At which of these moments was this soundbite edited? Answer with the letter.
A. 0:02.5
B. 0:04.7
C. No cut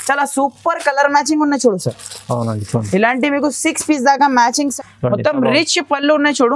B